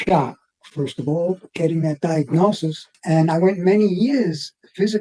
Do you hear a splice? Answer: no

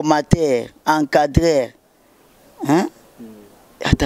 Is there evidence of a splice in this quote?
no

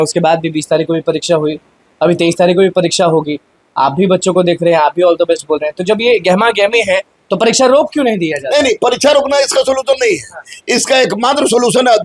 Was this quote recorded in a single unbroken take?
yes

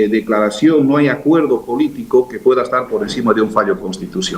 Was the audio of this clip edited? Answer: no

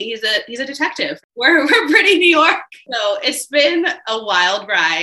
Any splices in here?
yes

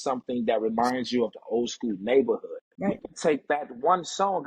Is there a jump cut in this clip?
yes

